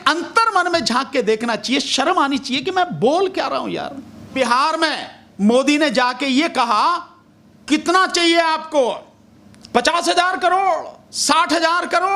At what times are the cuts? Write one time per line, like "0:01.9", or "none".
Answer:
0:04.3